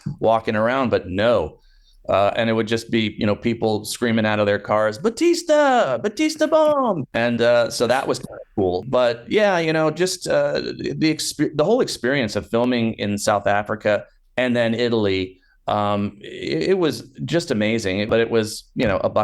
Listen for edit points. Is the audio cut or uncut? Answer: cut